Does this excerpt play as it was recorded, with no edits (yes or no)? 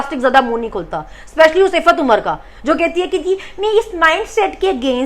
yes